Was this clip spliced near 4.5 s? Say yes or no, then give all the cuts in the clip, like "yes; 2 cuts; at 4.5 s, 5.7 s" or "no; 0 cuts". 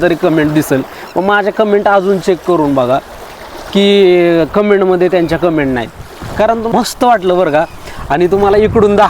no; 1 cut; at 6.7 s